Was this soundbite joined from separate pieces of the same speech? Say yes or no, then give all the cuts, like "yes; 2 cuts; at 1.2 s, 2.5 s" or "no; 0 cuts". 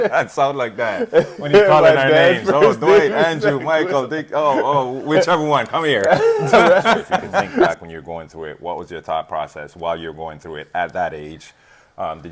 yes; 1 cut; at 7.7 s